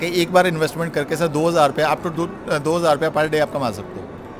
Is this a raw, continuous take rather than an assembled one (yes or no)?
yes